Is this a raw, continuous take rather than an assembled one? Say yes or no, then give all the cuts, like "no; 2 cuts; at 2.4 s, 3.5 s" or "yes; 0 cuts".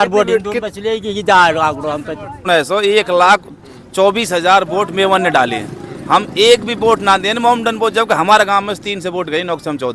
no; 1 cut; at 2.4 s